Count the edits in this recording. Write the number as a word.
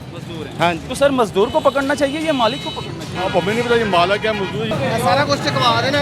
two